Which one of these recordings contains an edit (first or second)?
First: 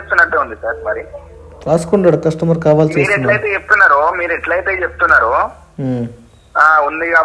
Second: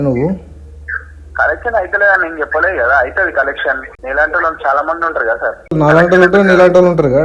second